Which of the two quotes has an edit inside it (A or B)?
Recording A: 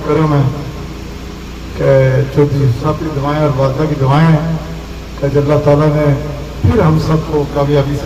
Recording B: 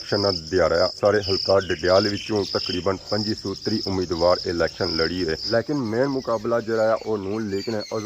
B